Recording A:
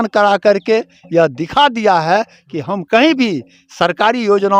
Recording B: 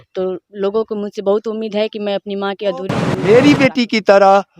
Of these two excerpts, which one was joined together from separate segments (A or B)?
B